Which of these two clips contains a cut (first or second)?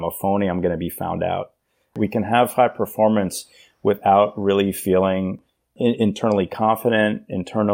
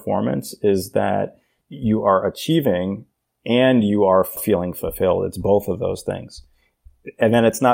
first